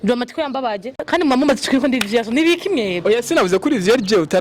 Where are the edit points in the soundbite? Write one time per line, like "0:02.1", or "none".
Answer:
0:01.1